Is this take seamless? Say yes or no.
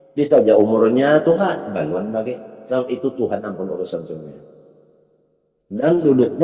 yes